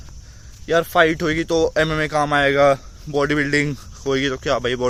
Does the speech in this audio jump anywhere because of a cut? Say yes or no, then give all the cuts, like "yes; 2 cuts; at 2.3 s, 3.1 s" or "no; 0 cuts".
no; 0 cuts